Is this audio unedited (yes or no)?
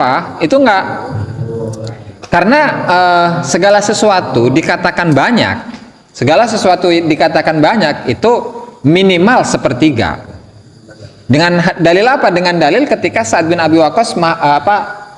yes